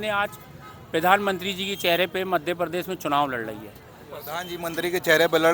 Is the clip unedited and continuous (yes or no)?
yes